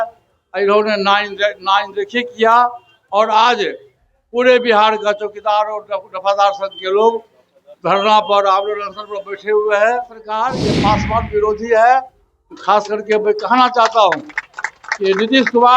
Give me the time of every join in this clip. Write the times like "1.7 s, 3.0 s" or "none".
10.4 s

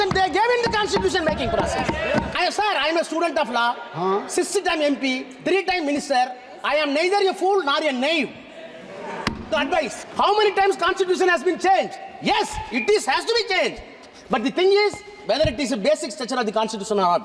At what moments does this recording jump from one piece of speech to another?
2.3 s, 10.0 s

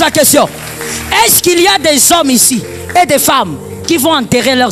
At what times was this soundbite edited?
none

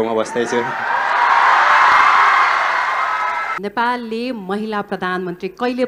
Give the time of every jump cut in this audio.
3.5 s

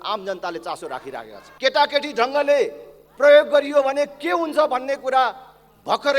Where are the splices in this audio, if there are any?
1.4 s

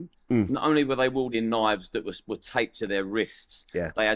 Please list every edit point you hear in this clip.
none

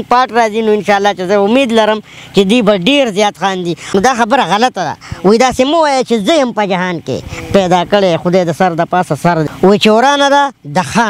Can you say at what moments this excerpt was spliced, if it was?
3.9 s, 9.5 s

